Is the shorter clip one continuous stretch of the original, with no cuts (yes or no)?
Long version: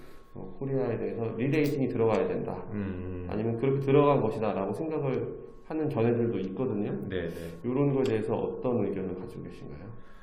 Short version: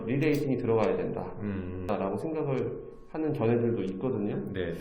no